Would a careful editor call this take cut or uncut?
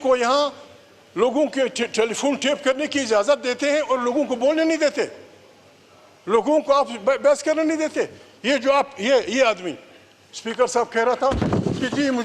uncut